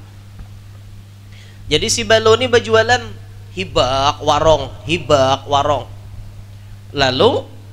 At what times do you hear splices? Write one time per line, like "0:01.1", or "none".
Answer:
none